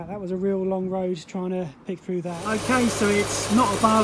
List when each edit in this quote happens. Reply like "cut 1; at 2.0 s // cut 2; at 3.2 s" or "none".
cut 1; at 2.4 s